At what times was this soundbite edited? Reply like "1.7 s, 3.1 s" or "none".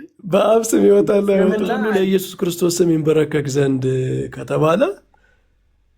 1.7 s